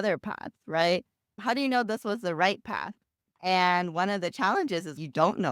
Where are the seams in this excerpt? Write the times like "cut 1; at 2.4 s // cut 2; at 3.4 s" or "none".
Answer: cut 1; at 1.4 s

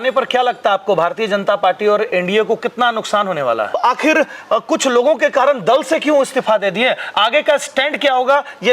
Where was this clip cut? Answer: cut 1; at 3.8 s

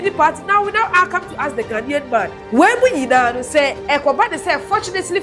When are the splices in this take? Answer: cut 1; at 2.4 s // cut 2; at 3.8 s

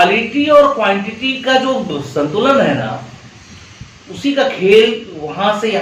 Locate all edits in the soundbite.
none

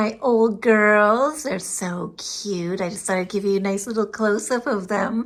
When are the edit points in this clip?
none

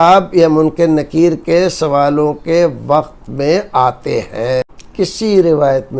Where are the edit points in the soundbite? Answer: cut 1; at 4.8 s

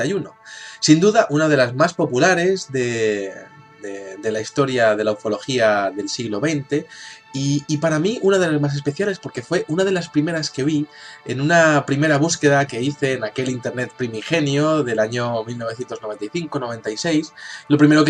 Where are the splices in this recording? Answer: cut 1; at 11.3 s

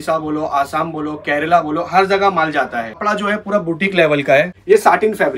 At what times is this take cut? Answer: cut 1; at 3.0 s // cut 2; at 4.5 s

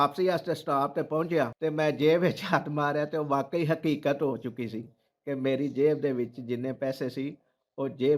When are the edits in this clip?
cut 1; at 1.5 s

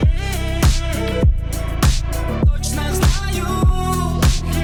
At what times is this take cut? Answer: none

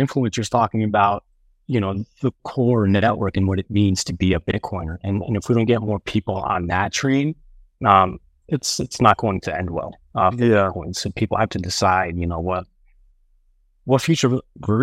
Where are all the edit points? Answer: none

